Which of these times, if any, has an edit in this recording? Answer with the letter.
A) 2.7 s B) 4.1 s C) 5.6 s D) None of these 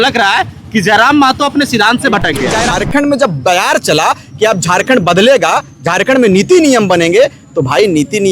A